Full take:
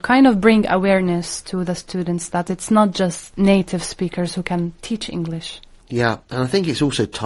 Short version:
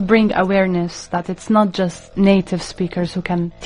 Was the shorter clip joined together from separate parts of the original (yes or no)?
yes